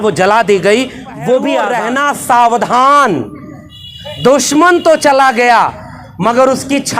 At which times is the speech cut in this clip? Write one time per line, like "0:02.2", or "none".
0:01.7